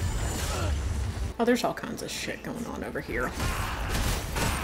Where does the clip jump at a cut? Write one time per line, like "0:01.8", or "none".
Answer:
0:01.1